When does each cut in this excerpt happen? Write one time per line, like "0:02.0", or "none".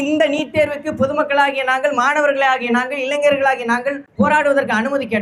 0:04.0